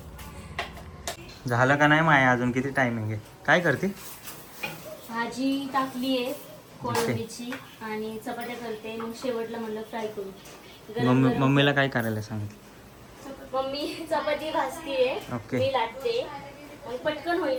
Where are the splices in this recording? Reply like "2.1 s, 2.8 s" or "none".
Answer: none